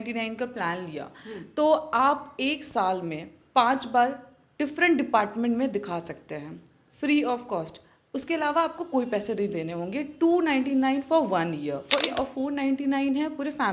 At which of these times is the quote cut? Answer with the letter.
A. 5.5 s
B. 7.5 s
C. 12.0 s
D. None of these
C